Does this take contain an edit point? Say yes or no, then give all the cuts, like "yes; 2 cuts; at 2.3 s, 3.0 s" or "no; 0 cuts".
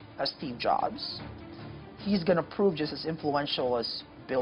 no; 0 cuts